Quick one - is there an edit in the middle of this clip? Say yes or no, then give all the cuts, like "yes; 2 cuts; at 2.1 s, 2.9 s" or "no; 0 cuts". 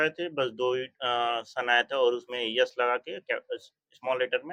no; 0 cuts